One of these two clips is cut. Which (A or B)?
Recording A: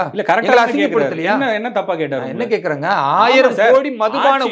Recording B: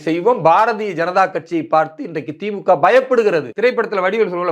B